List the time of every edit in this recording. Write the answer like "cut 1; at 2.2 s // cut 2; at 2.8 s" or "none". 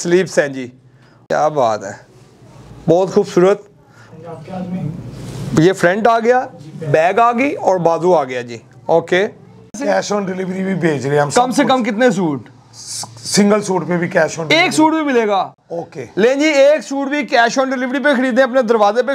cut 1; at 1.3 s // cut 2; at 9.8 s